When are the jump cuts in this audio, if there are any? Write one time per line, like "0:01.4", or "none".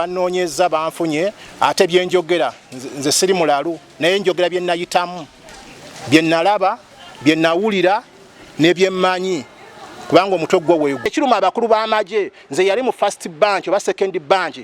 0:11.1